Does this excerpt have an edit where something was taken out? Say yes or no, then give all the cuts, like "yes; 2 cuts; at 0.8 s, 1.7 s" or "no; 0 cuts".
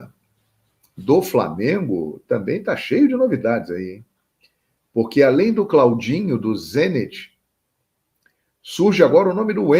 no; 0 cuts